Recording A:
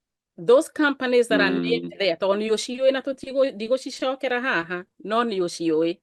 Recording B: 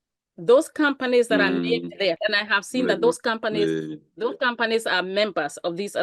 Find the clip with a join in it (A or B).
B